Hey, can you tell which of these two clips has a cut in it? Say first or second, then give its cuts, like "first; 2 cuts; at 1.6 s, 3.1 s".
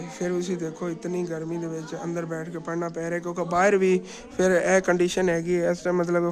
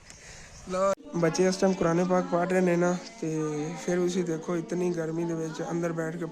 second; 1 cut; at 0.9 s